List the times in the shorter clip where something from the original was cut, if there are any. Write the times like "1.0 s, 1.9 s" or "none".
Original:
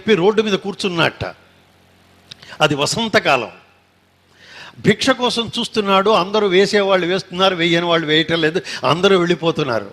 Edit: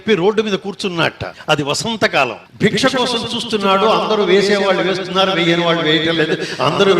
1.3 s, 2.4 s